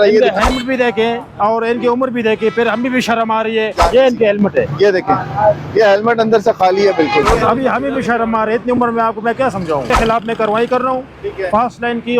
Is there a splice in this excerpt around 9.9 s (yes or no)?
yes